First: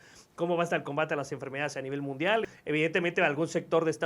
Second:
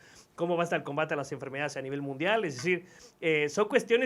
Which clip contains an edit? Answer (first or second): first